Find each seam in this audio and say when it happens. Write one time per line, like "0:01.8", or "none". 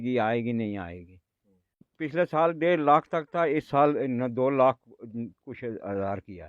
0:01.9